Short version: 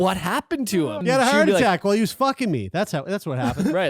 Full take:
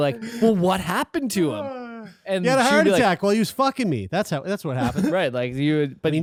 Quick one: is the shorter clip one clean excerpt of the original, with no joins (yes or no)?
no